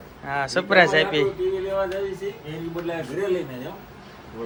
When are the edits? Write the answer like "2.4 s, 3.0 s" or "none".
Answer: none